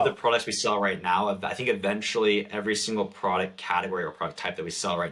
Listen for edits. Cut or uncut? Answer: uncut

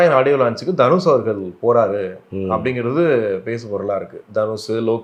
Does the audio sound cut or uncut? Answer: uncut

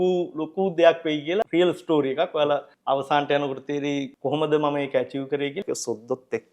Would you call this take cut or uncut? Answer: cut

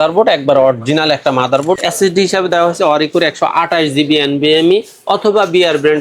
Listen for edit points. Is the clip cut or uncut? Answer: cut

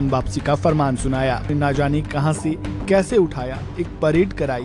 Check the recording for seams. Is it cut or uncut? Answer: cut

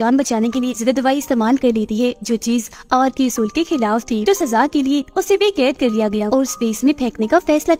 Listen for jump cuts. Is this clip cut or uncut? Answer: uncut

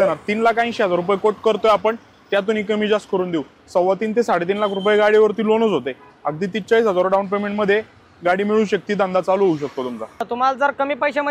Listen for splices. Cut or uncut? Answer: uncut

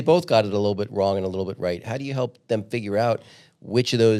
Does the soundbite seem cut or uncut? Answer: uncut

